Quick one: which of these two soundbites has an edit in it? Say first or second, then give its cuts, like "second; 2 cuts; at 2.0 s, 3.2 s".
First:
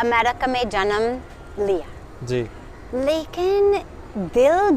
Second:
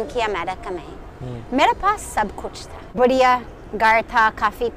second; 1 cut; at 3.0 s